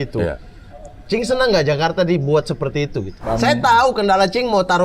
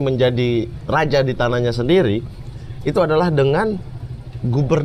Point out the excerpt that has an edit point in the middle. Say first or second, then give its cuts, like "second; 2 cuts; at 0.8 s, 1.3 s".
first; 1 cut; at 3.2 s